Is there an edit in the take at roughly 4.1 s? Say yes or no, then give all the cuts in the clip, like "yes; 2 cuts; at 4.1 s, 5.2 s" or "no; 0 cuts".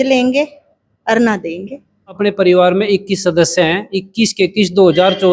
no; 1 cut; at 2.1 s